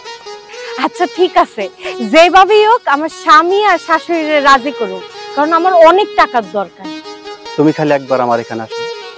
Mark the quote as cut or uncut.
uncut